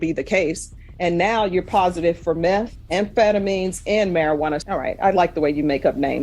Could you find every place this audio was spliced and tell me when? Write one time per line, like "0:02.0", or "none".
0:04.6